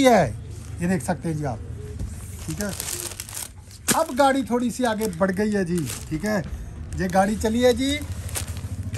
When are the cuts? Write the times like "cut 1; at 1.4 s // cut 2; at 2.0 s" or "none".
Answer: none

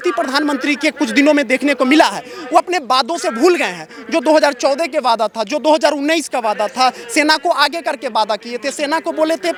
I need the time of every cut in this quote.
none

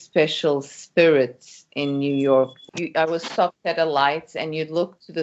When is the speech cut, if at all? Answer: cut 1; at 2.6 s

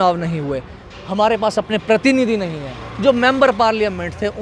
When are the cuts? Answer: none

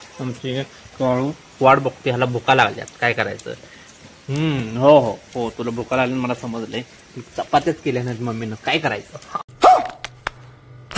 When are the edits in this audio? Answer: cut 1; at 9.4 s

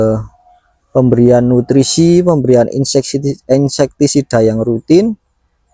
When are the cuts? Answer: none

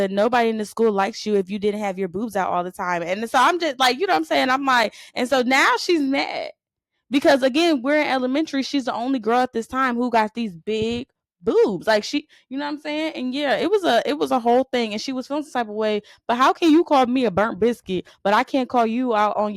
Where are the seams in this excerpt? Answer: none

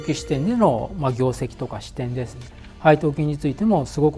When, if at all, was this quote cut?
none

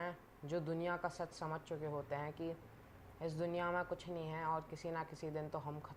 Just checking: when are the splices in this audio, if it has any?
none

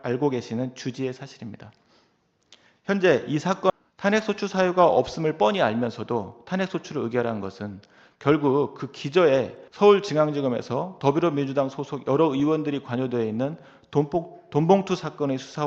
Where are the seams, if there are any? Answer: cut 1; at 3.7 s // cut 2; at 9.6 s

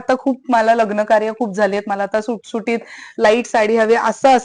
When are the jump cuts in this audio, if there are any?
none

